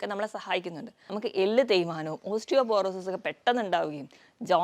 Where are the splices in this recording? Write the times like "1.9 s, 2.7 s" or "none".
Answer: 0.9 s